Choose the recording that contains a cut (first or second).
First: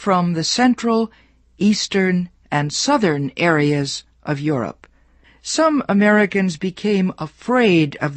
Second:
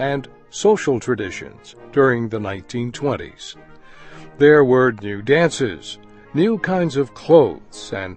first